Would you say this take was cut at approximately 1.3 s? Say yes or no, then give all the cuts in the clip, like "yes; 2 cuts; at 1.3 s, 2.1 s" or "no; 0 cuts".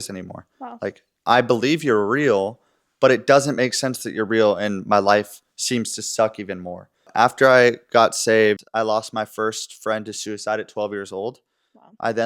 no; 2 cuts; at 7.1 s, 8.7 s